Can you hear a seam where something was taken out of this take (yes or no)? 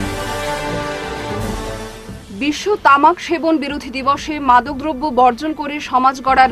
no